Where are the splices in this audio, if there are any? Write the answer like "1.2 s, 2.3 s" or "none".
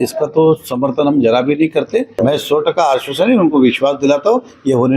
2.1 s